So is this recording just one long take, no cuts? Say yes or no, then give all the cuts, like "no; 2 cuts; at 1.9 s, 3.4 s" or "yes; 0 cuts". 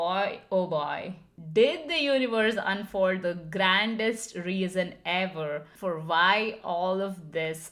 yes; 0 cuts